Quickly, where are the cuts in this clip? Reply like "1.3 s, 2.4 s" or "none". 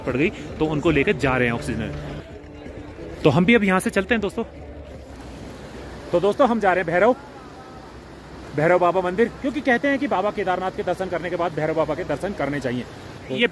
none